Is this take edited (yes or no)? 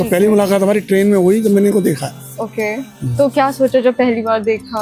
no